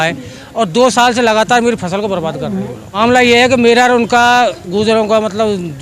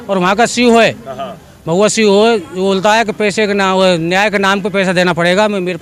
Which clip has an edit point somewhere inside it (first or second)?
first